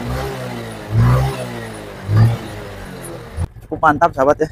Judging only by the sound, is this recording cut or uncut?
cut